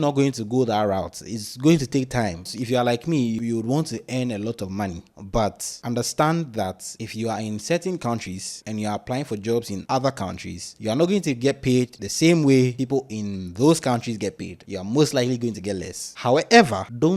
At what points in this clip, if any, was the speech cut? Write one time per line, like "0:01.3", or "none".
0:02.5
0:03.4
0:05.7
0:16.1